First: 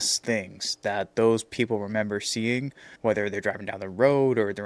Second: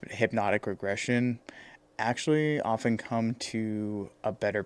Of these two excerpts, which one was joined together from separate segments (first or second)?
first